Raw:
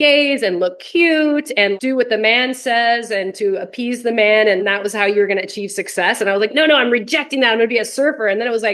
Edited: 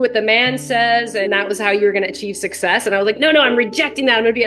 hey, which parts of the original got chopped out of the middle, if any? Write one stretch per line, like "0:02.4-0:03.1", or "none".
0:03.2-0:04.6